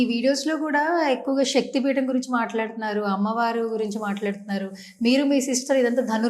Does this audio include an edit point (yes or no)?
no